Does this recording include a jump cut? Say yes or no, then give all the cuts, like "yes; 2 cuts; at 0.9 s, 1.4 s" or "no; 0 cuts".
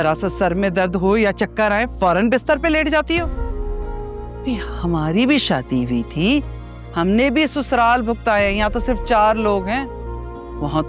no; 0 cuts